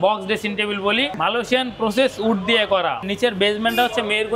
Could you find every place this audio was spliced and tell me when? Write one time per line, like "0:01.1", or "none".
0:01.2
0:03.1